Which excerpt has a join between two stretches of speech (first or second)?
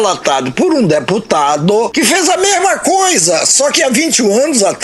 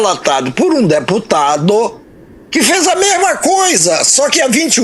first